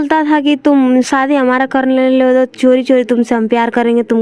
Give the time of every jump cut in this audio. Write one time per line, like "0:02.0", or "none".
none